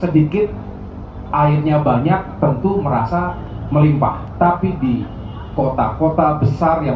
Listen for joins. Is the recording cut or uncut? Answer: cut